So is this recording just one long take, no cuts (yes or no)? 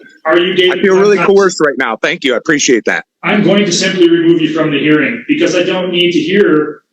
no